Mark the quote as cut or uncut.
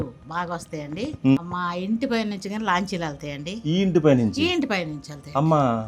cut